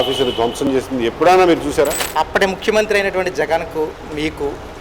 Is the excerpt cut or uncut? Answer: cut